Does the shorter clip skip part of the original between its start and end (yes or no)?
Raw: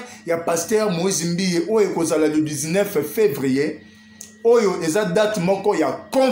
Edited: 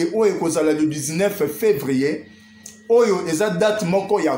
no